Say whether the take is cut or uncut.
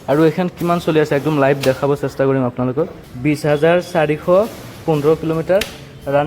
cut